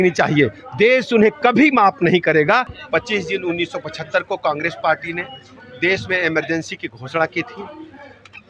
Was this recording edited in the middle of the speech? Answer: yes; 1 cut; at 2.7 s

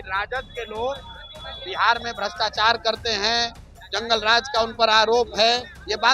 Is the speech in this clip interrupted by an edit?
no; 0 cuts

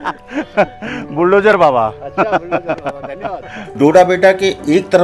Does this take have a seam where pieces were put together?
yes; 1 cut; at 3.6 s

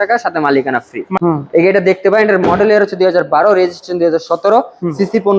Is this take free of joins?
no; 1 cut; at 1.2 s

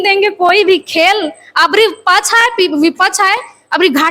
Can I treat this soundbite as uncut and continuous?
yes; 0 cuts

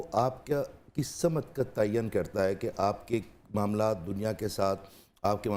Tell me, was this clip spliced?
no; 0 cuts

